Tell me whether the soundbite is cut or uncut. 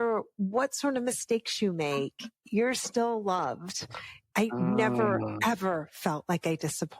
cut